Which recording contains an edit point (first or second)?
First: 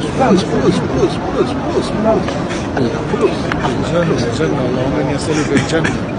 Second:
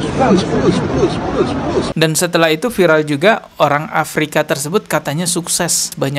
second